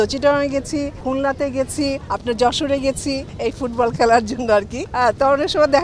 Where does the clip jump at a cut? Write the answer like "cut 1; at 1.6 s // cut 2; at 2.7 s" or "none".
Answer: cut 1; at 1.0 s // cut 2; at 2.1 s // cut 3; at 3.3 s // cut 4; at 4.8 s